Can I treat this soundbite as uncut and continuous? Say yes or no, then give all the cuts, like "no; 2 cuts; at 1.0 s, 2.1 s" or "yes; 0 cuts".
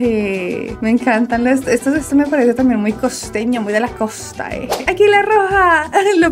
no; 1 cut; at 4.8 s